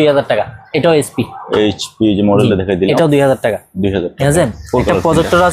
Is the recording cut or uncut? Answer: uncut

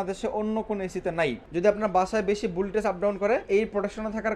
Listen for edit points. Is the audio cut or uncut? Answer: cut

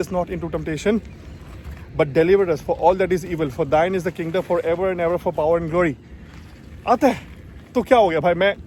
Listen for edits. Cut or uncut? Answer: uncut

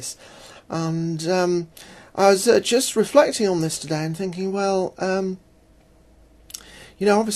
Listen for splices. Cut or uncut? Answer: cut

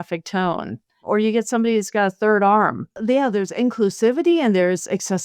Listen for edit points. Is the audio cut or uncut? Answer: cut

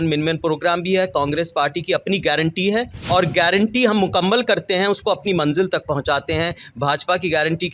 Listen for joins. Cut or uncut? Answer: cut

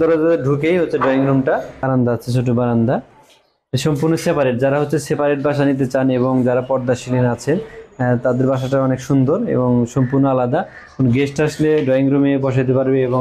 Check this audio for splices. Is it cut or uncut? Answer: cut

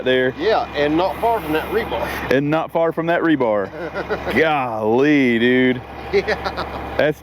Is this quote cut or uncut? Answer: uncut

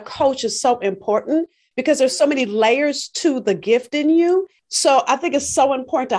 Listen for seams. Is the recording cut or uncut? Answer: cut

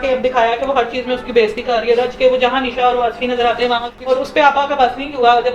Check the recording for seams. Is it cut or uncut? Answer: cut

